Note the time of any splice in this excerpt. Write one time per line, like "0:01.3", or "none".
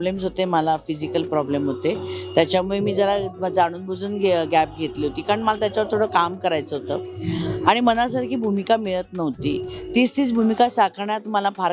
none

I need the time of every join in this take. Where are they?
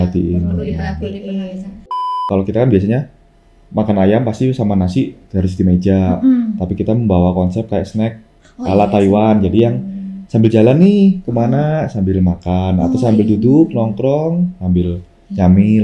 0:02.2

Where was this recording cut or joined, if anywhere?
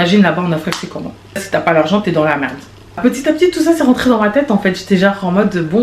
0:01.4
0:03.0

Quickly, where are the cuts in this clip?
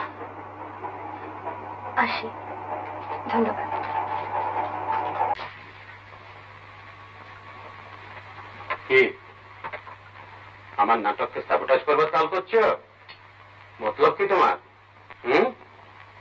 0:05.3

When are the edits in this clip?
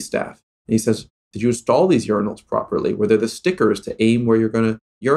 none

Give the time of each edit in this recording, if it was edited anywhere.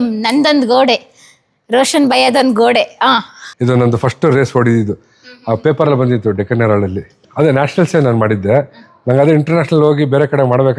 0:03.4
0:07.1

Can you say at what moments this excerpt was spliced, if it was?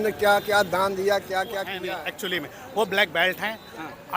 0:01.7

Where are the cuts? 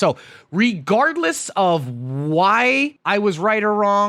0:03.0

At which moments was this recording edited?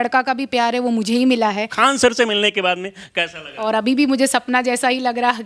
0:01.7
0:03.4

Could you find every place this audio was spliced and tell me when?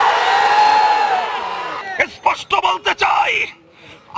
0:01.7

